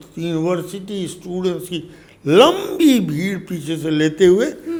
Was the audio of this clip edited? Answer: no; 0 cuts

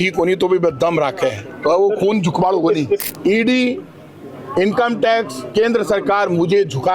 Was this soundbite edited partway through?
yes; 1 cut; at 3.0 s

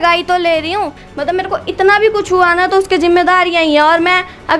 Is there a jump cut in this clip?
yes; 1 cut; at 1.0 s

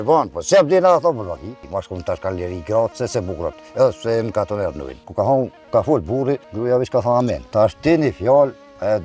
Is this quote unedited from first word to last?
yes; 0 cuts

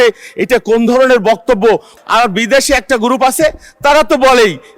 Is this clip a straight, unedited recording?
no; 1 cut; at 1.9 s

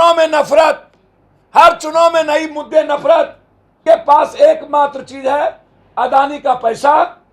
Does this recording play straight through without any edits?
no; 1 cut; at 3.7 s

